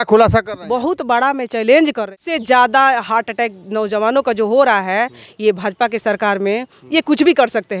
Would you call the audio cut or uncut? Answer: cut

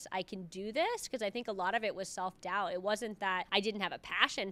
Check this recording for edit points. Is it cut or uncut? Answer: cut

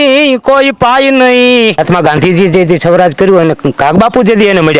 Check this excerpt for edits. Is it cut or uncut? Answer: cut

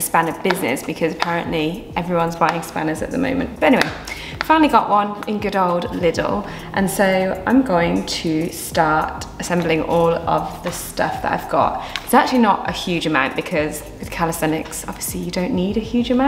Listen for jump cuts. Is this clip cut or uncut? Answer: uncut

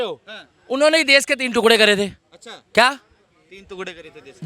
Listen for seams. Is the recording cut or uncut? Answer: uncut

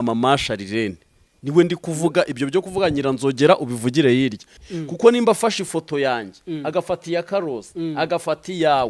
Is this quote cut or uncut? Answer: cut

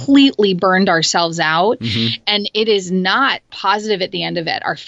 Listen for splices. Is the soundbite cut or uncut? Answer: cut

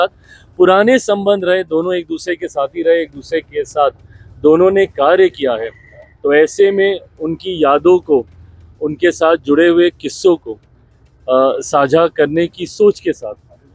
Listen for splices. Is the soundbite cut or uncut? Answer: uncut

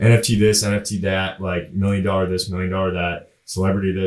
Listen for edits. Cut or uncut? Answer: uncut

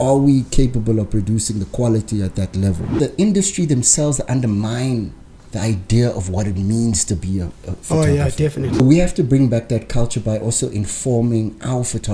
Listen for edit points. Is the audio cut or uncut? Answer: cut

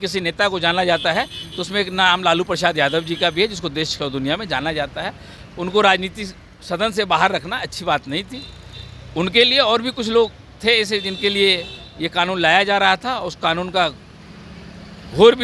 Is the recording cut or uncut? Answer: uncut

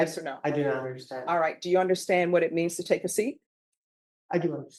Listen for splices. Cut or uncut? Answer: uncut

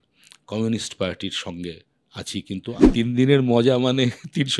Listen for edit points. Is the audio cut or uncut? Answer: cut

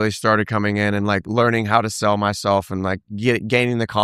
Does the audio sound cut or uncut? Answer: uncut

